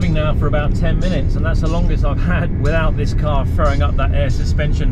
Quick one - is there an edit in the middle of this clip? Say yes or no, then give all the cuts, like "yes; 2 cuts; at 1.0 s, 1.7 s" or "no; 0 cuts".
yes; 1 cut; at 2.5 s